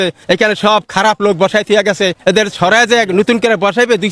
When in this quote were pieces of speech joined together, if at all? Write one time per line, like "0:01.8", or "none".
none

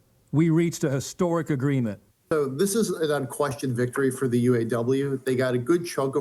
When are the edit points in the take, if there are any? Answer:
0:02.1

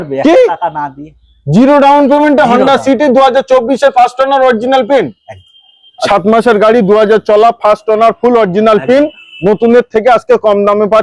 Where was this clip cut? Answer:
0:05.9

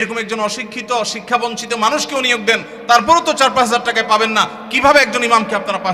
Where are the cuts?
none

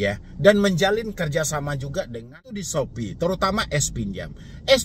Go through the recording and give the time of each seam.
0:02.7

